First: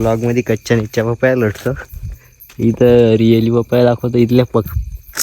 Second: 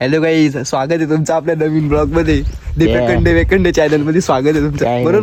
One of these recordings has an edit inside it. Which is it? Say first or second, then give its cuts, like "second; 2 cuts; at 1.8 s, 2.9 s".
first; 1 cut; at 2.3 s